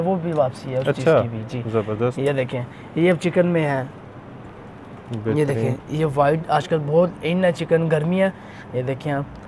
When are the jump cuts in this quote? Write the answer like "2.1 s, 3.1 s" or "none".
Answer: none